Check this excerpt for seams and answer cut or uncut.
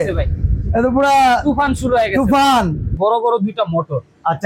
cut